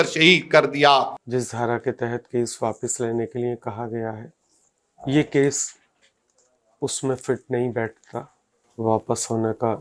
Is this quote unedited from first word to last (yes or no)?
no